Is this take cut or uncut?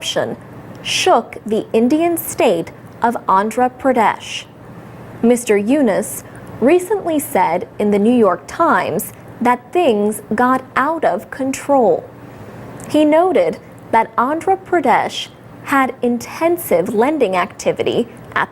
cut